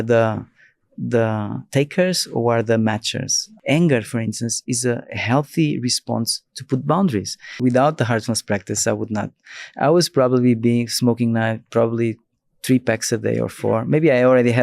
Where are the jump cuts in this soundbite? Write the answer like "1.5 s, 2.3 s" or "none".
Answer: 3.4 s, 7.4 s